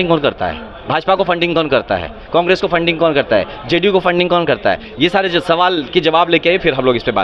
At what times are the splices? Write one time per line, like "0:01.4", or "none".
none